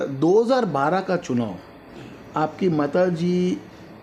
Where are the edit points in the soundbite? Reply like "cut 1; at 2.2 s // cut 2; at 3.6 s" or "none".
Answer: none